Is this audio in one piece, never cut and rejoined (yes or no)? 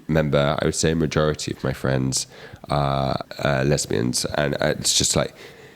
no